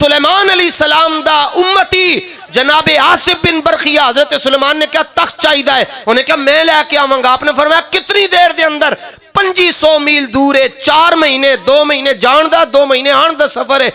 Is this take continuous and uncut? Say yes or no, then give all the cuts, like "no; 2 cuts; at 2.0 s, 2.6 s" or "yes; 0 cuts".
yes; 0 cuts